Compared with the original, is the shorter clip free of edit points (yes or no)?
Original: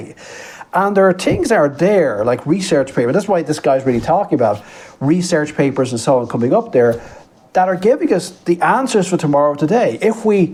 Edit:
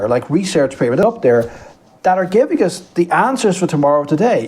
no